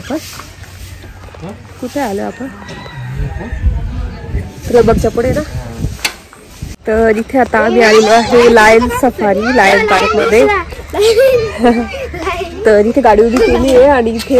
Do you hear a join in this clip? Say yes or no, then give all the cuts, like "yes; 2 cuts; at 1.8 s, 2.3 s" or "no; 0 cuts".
yes; 1 cut; at 6.7 s